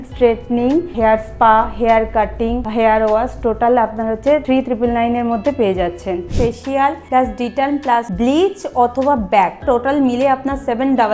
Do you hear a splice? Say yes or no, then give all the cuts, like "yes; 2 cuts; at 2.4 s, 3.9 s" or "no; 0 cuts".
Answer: yes; 6 cuts; at 0.9 s, 2.6 s, 4.4 s, 6.7 s, 8.1 s, 9.6 s